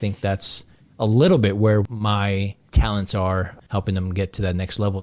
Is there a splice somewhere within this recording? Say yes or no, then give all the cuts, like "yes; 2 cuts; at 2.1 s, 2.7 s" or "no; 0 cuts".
yes; 2 cuts; at 1.9 s, 3.6 s